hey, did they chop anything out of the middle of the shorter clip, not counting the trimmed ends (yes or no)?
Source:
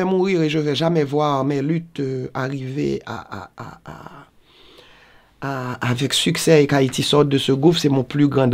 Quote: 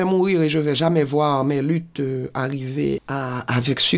yes